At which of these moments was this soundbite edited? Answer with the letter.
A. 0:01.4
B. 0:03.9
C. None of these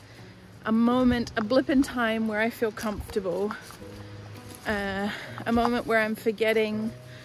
C